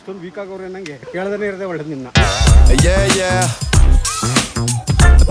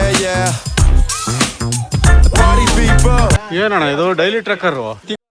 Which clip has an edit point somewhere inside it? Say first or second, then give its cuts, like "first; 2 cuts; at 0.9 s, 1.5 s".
second; 1 cut; at 3.4 s